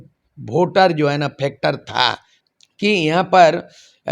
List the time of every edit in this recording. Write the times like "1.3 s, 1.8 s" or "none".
2.3 s